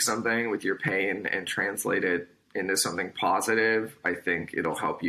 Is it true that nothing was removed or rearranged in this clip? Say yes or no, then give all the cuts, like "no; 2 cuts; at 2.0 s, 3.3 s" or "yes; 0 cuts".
yes; 0 cuts